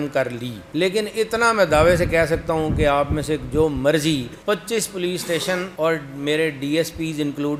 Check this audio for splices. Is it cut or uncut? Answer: uncut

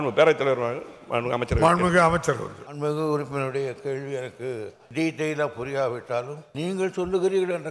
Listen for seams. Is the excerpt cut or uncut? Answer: cut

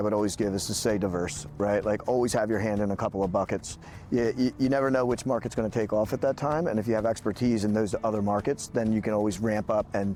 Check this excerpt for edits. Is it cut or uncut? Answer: uncut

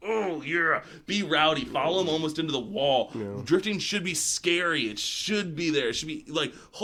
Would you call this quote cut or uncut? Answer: uncut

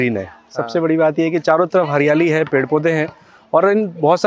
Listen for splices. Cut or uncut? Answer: uncut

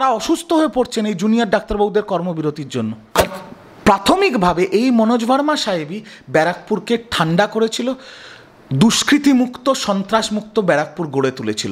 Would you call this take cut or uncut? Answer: cut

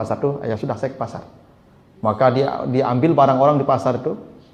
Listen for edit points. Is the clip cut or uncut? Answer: uncut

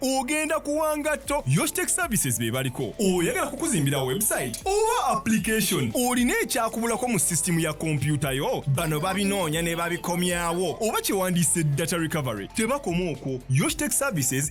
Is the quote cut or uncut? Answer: uncut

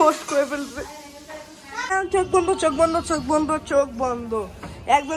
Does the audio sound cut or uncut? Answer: cut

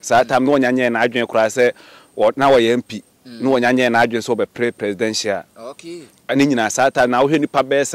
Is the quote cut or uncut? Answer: uncut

